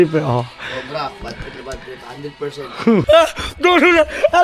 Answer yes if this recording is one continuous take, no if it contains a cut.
no